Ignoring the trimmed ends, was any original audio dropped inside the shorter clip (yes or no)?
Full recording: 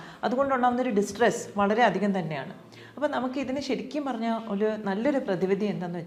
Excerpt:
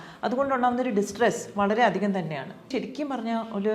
yes